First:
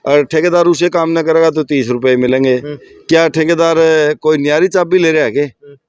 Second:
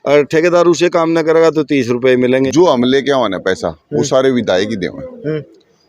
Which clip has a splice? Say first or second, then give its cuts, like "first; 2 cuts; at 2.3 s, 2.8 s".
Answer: second; 1 cut; at 2.3 s